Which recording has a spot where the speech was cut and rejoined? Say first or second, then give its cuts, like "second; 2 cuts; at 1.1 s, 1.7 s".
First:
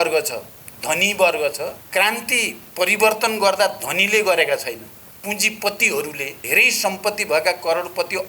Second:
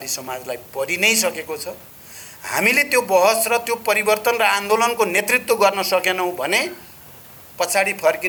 first; 2 cuts; at 1.8 s, 6.3 s